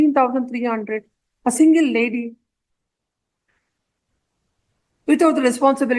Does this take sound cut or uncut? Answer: uncut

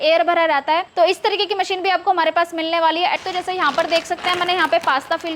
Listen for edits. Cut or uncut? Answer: cut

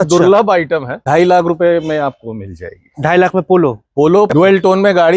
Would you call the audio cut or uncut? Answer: cut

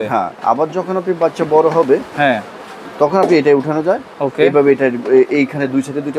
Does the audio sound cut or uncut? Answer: uncut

